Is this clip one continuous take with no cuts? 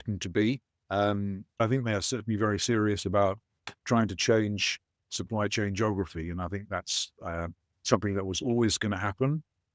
no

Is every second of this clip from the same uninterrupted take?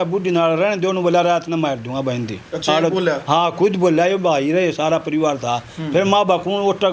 yes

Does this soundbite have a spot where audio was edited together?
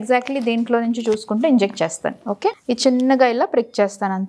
yes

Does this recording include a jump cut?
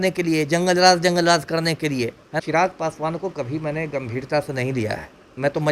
yes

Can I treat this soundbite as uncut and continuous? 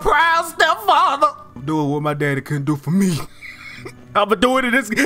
no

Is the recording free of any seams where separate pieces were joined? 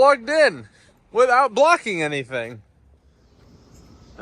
no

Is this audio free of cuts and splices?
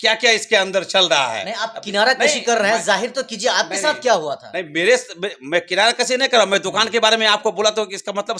yes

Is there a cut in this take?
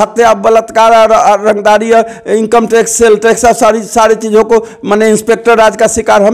no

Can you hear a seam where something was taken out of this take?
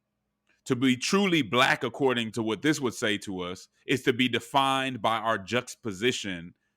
yes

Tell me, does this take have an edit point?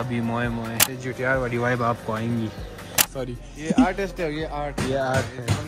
yes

